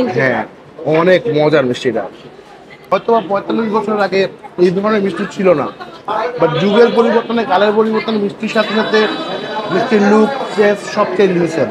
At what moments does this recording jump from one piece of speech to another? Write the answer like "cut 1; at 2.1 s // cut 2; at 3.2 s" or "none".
cut 1; at 2.9 s